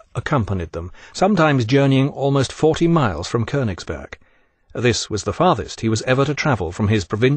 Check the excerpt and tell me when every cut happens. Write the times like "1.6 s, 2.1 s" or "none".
2.8 s